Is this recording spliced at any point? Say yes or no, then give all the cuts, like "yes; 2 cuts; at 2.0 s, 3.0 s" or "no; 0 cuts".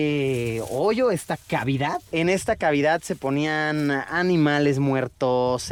no; 0 cuts